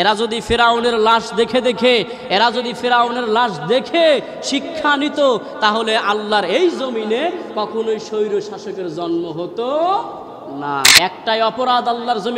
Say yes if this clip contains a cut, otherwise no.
yes